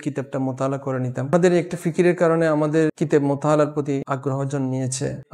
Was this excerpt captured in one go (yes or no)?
no